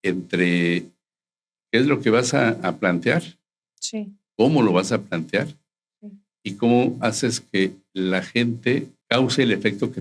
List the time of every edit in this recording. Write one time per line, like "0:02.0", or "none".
0:09.0